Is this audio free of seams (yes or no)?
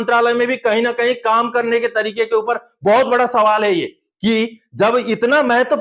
yes